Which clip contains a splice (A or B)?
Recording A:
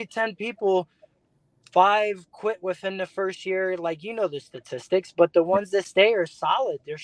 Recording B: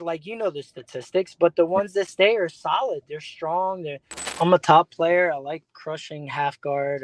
B